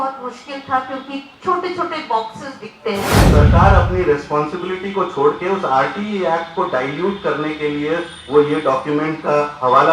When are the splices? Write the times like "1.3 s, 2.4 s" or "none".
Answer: 3.2 s